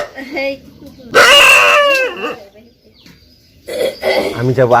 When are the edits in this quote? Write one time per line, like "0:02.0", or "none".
0:01.1